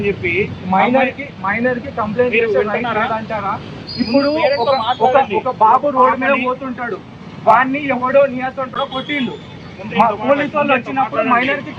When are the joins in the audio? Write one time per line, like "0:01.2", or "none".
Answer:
none